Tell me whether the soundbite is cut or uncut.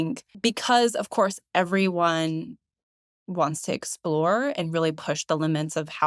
uncut